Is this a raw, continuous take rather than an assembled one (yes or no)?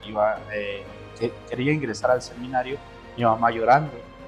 yes